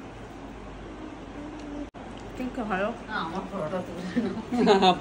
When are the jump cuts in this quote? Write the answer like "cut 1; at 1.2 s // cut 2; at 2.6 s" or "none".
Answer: cut 1; at 1.9 s